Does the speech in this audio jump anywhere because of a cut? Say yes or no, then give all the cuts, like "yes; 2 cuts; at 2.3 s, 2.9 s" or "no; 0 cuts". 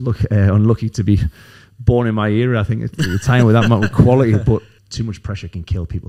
yes; 1 cut; at 4.7 s